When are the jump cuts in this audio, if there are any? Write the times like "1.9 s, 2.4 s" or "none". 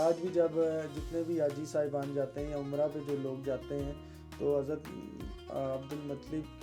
none